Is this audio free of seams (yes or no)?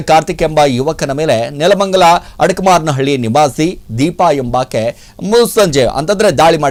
yes